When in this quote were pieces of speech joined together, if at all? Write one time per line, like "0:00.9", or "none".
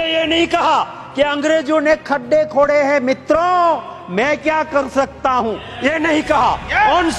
none